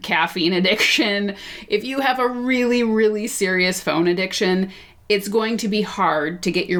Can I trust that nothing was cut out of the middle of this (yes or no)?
yes